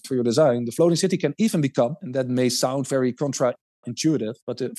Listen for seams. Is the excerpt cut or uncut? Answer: uncut